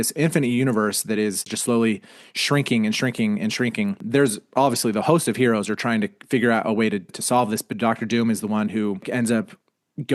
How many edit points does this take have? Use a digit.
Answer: 3